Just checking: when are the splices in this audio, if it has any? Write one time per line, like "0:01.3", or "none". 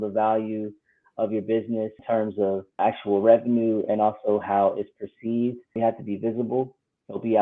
0:02.0
0:02.8
0:05.8